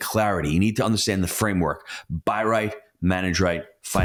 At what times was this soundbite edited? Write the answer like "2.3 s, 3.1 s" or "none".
none